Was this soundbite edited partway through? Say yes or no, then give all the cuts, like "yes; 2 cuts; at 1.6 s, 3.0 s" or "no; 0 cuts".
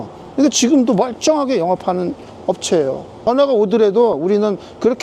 yes; 1 cut; at 3.2 s